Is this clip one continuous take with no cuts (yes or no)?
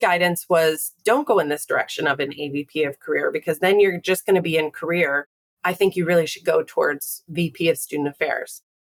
yes